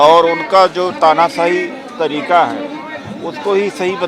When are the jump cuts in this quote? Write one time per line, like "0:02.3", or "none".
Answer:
none

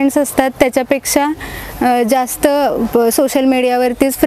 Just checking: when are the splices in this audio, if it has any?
none

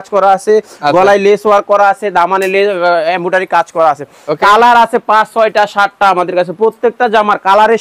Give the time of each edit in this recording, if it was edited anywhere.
none

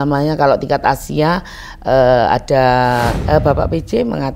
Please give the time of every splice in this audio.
0:03.2

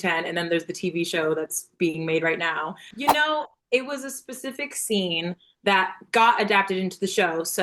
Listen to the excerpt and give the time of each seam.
0:02.8

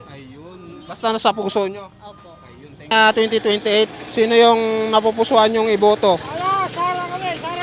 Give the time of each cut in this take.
0:02.9

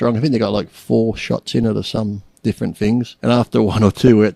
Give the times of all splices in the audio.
0:03.1

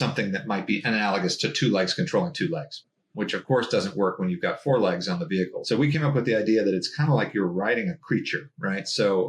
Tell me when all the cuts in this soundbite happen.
0:02.8

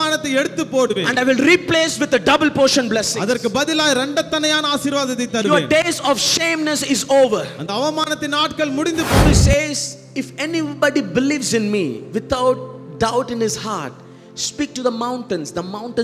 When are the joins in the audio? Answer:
0:09.2

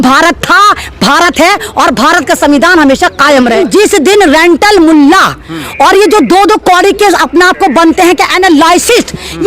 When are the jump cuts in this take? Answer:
0:03.6

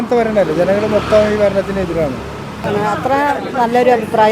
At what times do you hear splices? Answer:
0:02.5

